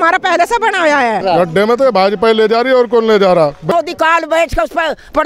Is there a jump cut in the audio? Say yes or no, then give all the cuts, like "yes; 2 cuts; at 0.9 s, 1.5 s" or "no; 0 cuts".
yes; 2 cuts; at 1.2 s, 3.7 s